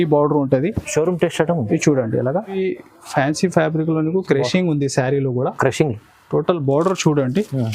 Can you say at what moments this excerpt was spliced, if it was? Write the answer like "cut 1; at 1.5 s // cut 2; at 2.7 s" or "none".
cut 1; at 2.5 s